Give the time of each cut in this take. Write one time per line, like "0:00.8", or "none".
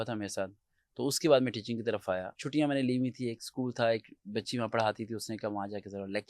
0:02.3